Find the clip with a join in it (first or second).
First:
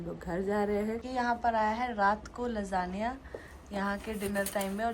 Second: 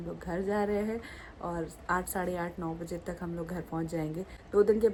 first